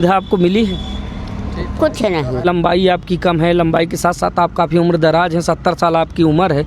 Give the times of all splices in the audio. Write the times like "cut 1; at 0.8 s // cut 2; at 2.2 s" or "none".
cut 1; at 2.5 s